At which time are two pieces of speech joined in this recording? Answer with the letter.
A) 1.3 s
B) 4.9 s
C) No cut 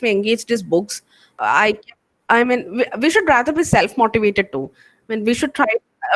A